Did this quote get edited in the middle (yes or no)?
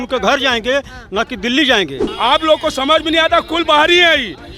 yes